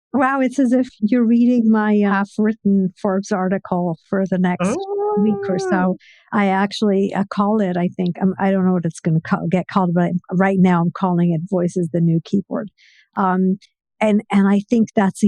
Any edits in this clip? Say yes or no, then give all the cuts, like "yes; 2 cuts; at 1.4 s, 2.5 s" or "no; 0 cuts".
yes; 1 cut; at 1.0 s